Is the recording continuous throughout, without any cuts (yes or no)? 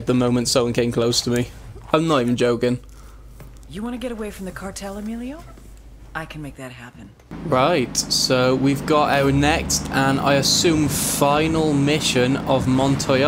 no